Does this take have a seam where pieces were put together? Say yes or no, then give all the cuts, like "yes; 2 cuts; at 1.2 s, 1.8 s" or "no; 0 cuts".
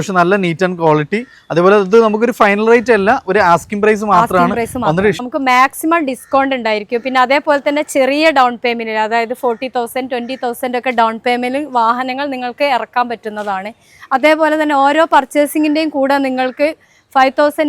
yes; 1 cut; at 5.2 s